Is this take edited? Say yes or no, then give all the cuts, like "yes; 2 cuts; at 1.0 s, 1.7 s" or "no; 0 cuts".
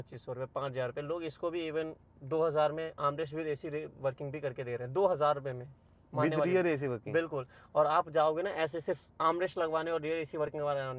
no; 0 cuts